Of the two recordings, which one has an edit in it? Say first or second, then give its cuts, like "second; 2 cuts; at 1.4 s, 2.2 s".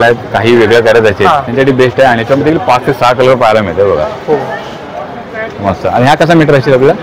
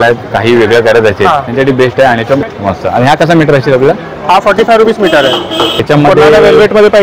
second; 2 cuts; at 2.4 s, 5.8 s